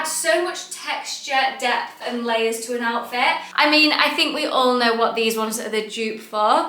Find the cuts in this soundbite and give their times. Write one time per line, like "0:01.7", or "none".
0:03.5